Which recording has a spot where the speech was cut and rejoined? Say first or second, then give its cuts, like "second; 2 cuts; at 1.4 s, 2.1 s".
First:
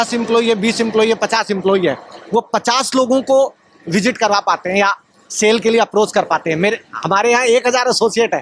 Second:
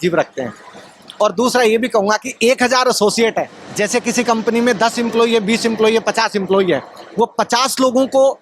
second; 1 cut; at 3.6 s